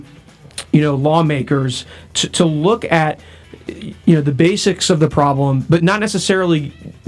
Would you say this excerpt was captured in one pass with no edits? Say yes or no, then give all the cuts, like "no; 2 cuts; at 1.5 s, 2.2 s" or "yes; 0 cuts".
yes; 0 cuts